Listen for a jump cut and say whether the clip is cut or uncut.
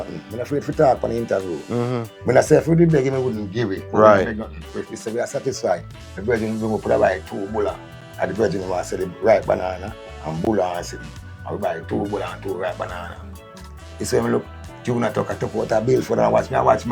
uncut